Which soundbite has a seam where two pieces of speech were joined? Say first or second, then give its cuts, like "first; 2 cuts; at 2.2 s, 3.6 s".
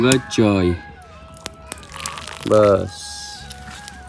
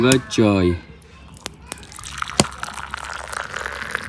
first; 1 cut; at 2.0 s